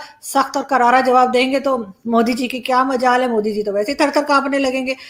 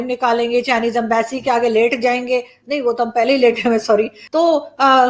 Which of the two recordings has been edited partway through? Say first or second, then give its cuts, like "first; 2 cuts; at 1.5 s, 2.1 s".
second; 1 cut; at 4.2 s